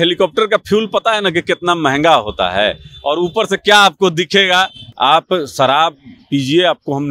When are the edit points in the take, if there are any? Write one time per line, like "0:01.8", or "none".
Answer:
0:04.8